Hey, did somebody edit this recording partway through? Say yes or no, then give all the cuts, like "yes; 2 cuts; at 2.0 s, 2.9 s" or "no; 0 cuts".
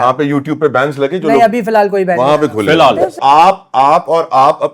yes; 1 cut; at 3.2 s